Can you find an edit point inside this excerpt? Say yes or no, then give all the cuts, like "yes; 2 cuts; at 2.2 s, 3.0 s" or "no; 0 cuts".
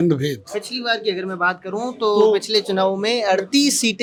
no; 0 cuts